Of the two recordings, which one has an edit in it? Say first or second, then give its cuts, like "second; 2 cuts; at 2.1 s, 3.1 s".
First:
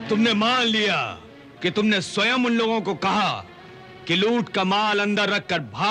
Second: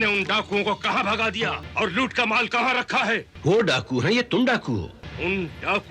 second; 3 cuts; at 1.6 s, 3.3 s, 5.0 s